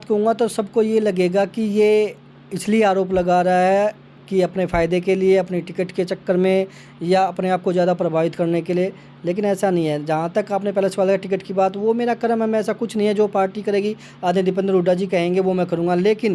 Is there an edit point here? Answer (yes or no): no